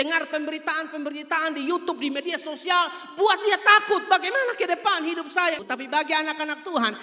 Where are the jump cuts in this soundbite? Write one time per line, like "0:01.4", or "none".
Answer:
0:05.6